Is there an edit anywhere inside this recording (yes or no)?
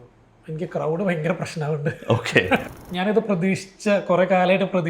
yes